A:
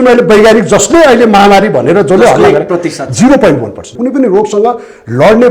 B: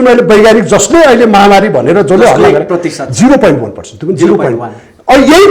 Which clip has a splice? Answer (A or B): A